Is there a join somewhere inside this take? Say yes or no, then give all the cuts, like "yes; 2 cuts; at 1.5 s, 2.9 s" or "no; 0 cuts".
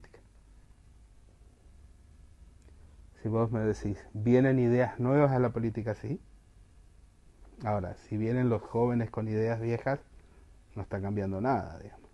no; 0 cuts